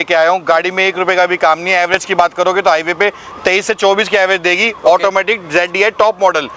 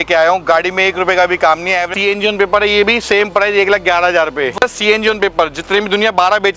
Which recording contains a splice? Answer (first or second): second